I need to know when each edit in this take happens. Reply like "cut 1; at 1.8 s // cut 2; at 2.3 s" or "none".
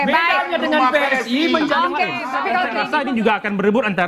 cut 1; at 2.2 s